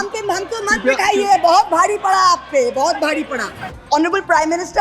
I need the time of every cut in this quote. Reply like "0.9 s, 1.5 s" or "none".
3.7 s